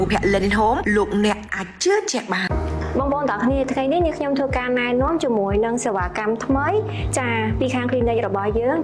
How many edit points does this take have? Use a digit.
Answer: 0